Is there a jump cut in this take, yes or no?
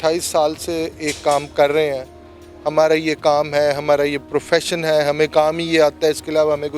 no